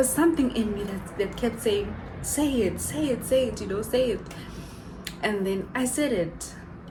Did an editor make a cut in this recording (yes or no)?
no